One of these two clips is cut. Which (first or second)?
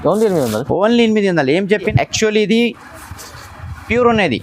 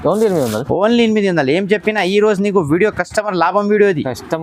first